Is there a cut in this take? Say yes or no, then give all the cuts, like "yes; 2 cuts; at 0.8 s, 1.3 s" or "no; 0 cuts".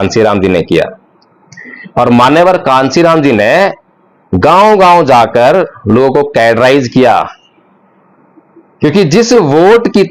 no; 0 cuts